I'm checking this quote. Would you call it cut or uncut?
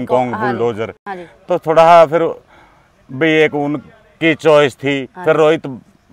uncut